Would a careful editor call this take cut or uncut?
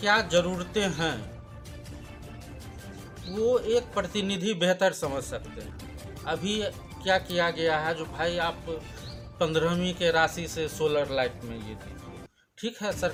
uncut